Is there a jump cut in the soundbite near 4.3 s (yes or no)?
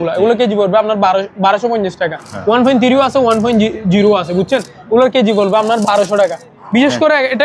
no